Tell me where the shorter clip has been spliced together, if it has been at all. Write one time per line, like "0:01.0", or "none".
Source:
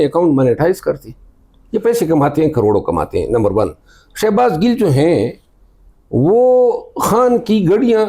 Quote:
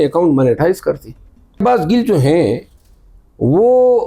0:01.6